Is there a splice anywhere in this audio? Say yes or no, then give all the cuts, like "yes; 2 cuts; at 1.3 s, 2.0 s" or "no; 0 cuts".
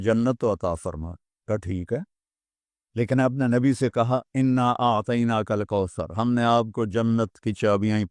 yes; 1 cut; at 1.4 s